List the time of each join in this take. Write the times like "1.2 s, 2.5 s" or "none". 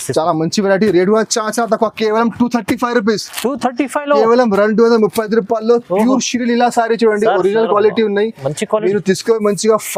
none